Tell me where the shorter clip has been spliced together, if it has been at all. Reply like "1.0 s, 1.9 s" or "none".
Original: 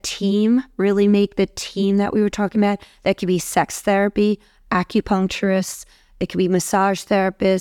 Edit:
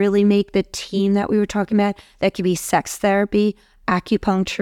none